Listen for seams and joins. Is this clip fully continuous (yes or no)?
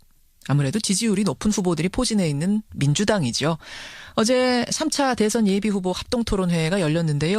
yes